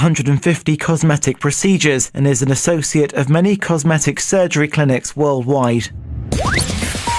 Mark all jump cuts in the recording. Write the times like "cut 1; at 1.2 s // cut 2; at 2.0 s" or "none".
cut 1; at 6.0 s